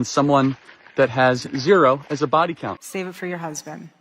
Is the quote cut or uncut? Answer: cut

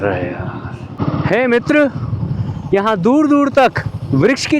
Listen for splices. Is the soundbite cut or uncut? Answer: cut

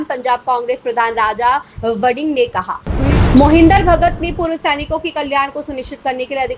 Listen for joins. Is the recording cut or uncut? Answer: cut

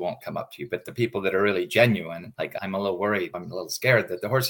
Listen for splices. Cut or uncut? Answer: cut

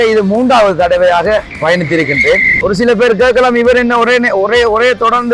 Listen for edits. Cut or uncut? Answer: cut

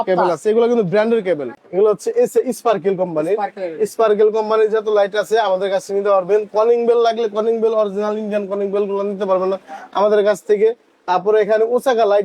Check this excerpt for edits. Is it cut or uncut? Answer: cut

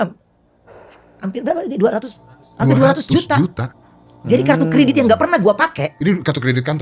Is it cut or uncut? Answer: uncut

